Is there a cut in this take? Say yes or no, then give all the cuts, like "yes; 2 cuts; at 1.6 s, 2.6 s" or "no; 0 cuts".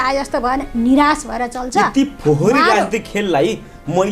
no; 0 cuts